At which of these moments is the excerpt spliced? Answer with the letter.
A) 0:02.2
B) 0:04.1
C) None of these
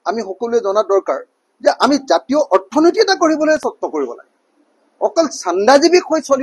C